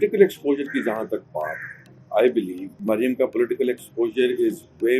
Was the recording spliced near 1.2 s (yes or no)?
no